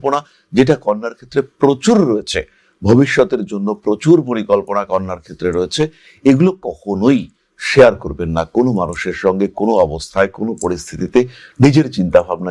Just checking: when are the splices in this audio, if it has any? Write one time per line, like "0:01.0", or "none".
none